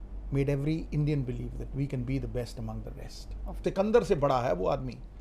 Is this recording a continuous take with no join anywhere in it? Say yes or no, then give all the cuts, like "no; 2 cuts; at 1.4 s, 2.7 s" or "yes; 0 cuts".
no; 1 cut; at 3.6 s